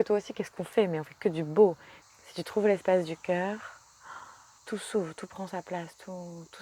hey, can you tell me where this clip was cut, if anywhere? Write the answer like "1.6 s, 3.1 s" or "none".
1.9 s, 4.6 s

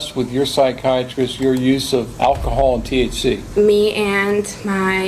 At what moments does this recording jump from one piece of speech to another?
2.1 s, 3.4 s

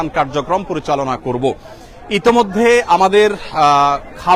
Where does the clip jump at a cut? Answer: none

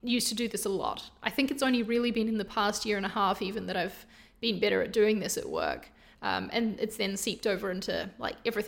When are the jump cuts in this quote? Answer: none

